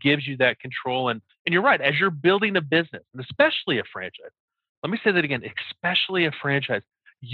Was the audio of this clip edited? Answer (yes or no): yes